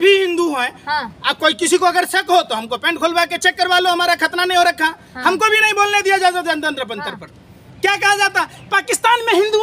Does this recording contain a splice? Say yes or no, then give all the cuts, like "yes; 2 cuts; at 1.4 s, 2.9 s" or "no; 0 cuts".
no; 0 cuts